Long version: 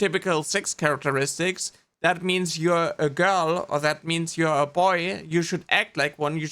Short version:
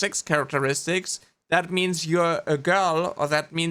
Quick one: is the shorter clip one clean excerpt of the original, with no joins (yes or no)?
yes